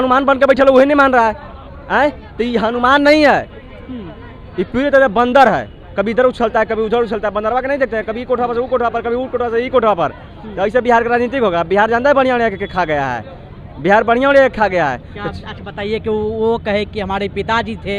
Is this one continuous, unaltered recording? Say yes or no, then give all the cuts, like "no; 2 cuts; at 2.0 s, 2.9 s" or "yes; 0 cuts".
yes; 0 cuts